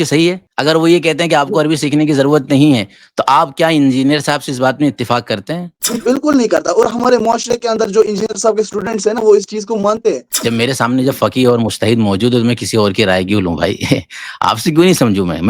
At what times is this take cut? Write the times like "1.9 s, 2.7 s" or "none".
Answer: 10.3 s